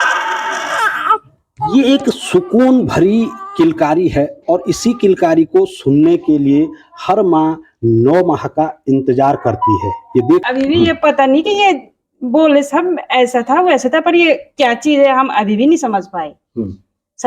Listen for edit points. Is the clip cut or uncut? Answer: cut